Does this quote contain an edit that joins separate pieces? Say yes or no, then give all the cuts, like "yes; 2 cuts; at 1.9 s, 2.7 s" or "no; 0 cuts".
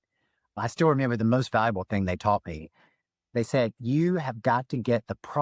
yes; 1 cut; at 1.2 s